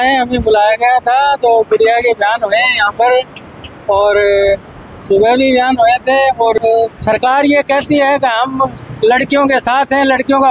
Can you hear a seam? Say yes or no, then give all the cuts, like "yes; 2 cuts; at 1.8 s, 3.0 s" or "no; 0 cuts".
yes; 1 cut; at 6.6 s